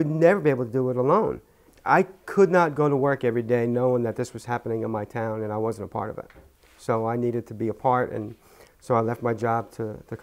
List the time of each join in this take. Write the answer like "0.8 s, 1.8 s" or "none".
1.4 s